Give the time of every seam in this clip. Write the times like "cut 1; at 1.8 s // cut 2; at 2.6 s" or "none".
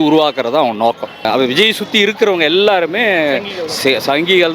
cut 1; at 1.2 s

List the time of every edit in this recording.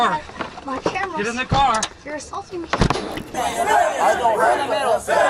cut 1; at 3.4 s

